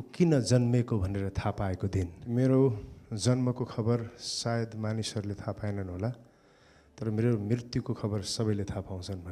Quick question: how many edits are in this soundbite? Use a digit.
1